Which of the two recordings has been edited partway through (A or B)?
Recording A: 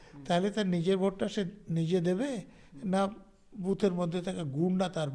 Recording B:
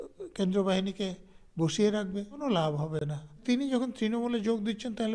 B